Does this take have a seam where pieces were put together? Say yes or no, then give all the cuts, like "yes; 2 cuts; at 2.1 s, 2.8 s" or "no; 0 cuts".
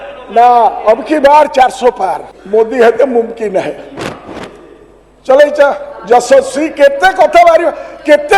yes; 1 cut; at 2.3 s